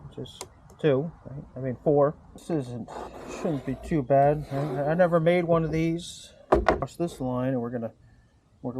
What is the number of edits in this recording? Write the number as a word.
two